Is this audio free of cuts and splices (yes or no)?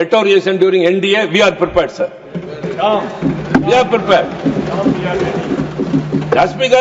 yes